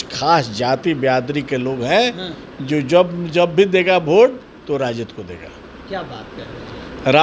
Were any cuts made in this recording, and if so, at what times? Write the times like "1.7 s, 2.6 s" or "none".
none